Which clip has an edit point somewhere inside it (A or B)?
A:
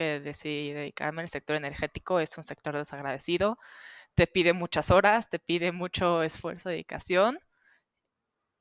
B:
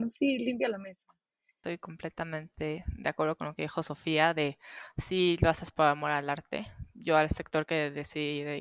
B